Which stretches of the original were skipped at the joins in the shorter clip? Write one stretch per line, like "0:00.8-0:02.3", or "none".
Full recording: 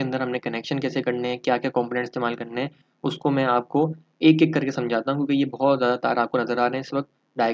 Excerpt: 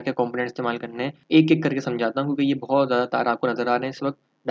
0:02.7-0:04.1